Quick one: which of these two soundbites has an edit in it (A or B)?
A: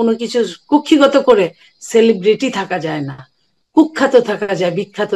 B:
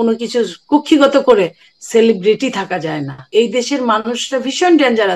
B